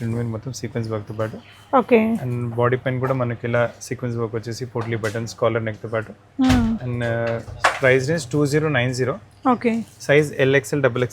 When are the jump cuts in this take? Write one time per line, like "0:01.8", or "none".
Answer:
none